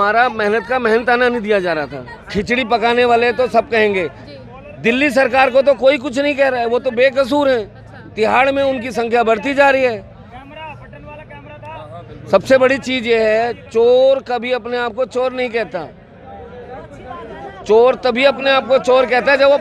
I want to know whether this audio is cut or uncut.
uncut